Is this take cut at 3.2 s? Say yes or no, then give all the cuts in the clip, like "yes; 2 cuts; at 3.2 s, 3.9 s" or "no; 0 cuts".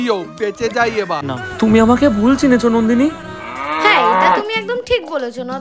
no; 1 cut; at 1.4 s